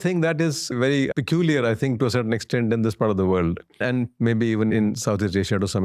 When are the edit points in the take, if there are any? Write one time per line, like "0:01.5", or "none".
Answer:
0:01.0
0:03.8
0:04.7